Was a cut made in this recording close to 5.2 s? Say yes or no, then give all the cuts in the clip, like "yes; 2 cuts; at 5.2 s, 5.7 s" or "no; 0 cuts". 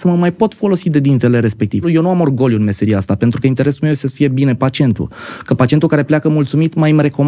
no; 1 cut; at 1.9 s